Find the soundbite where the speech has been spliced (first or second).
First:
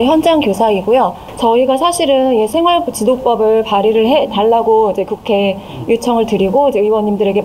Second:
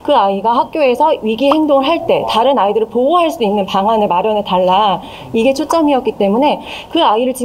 first